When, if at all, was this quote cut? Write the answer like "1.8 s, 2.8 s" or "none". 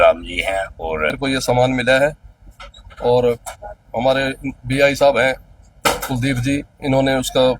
1.1 s